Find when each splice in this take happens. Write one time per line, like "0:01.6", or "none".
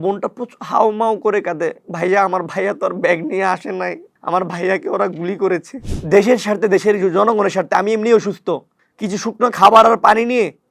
0:05.9